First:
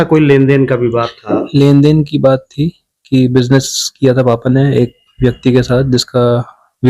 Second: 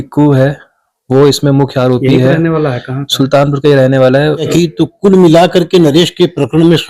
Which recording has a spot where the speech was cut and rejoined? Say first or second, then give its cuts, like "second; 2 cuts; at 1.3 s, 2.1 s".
second; 1 cut; at 4.5 s